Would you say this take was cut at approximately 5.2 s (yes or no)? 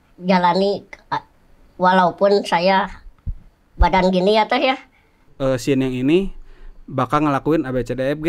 yes